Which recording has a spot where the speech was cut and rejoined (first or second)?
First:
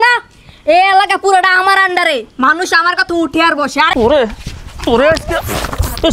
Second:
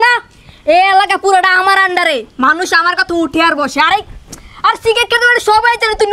first